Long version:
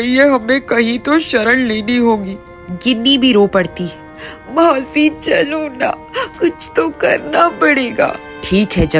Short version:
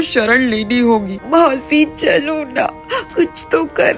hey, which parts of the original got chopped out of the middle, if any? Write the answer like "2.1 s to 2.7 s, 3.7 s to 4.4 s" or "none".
2.3 s to 4.4 s